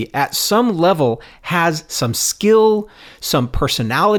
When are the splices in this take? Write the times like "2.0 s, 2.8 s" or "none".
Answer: none